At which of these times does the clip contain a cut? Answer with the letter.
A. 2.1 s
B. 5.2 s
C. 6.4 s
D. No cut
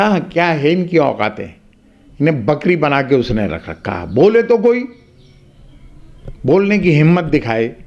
D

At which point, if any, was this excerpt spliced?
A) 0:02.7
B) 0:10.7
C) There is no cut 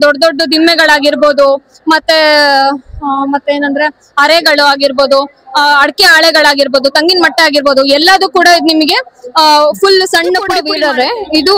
B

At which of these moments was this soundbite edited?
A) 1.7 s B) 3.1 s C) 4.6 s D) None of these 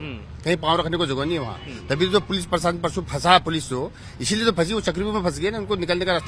D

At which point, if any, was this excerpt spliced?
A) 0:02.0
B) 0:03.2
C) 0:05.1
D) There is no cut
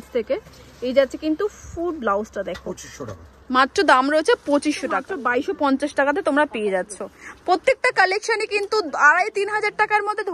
C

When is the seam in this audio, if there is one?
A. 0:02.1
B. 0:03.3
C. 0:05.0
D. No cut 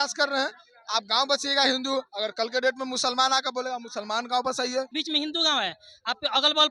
C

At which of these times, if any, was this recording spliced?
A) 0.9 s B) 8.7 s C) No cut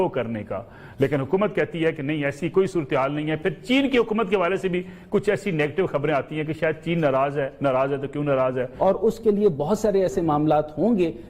B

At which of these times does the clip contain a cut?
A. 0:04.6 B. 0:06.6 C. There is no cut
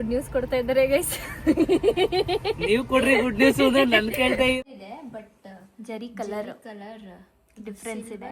A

